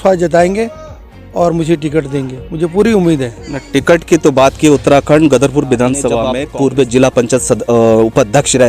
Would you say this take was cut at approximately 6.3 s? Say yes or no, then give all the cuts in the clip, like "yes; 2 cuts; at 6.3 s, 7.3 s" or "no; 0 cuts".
yes; 1 cut; at 6.3 s